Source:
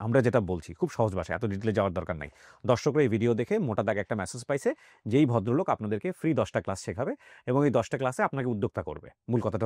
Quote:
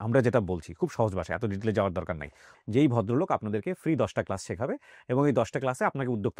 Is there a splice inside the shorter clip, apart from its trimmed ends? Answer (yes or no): yes